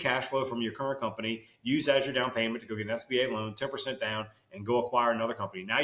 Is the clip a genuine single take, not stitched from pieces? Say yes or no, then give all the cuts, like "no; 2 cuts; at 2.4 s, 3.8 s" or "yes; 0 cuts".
yes; 0 cuts